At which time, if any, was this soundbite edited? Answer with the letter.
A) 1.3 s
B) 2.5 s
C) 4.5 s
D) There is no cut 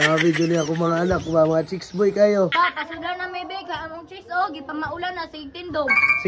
B